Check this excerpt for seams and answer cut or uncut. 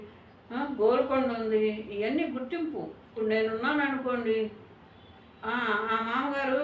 cut